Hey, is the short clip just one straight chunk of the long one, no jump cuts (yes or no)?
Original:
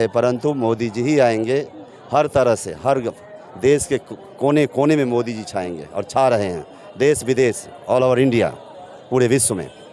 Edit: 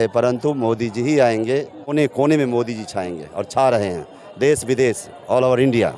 no